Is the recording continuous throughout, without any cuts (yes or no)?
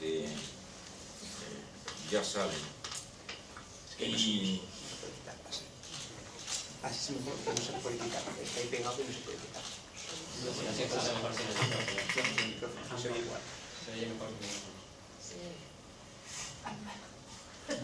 no